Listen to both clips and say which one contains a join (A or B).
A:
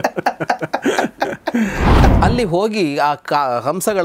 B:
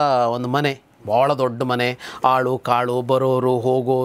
A